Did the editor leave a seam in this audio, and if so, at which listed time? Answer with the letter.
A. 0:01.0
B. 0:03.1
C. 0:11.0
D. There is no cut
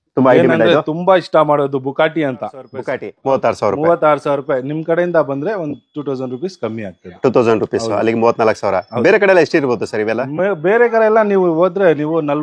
B